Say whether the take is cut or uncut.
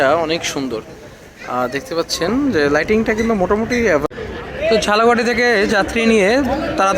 cut